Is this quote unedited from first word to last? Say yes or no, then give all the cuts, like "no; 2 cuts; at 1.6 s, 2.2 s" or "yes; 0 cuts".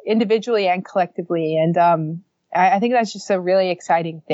yes; 0 cuts